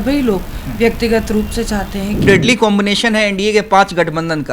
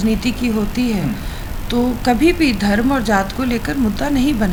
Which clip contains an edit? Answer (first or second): first